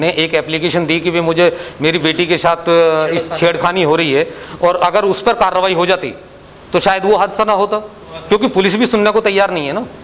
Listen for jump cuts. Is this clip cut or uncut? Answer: uncut